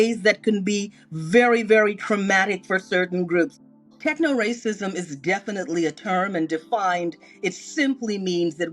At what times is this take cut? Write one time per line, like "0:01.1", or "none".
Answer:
0:03.5